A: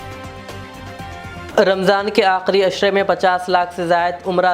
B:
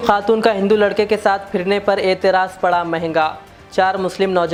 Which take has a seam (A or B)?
A